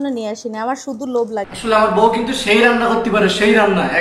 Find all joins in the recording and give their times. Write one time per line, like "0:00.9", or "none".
0:01.5